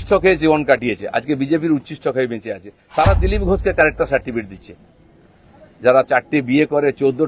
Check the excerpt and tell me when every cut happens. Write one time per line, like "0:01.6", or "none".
none